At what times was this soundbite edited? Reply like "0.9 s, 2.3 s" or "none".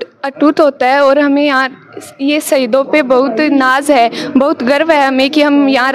none